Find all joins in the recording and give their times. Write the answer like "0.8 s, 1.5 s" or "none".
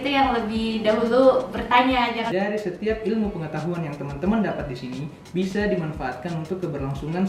2.2 s